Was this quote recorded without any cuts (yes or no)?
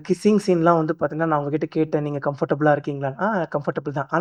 yes